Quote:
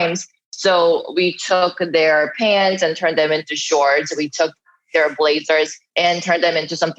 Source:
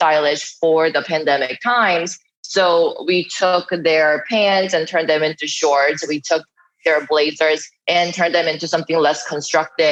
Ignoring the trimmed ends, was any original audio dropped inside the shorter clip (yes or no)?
no